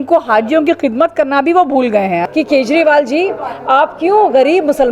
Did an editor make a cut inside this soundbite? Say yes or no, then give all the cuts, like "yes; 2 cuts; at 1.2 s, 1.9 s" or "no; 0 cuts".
yes; 1 cut; at 2.2 s